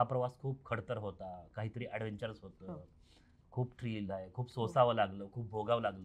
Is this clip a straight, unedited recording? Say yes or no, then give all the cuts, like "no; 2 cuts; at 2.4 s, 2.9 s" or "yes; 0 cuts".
yes; 0 cuts